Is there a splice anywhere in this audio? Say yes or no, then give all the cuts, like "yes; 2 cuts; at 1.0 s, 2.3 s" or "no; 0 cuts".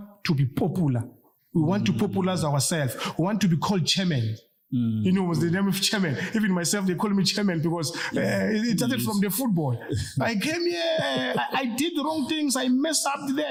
no; 0 cuts